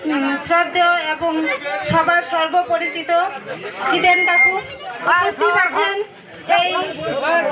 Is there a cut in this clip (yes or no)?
no